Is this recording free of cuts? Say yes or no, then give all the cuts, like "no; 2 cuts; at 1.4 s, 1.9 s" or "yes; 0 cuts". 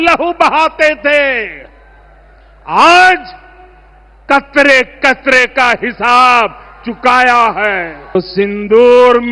no; 1 cut; at 8.2 s